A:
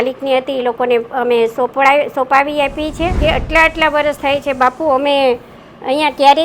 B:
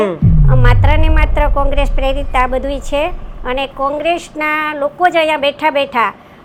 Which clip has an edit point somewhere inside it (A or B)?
A